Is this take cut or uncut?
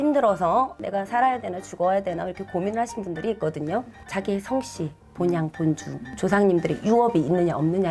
cut